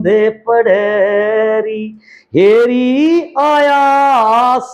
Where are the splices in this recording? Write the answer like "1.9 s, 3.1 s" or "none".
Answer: none